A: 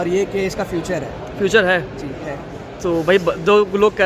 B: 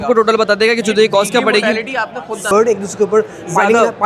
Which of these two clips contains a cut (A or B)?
B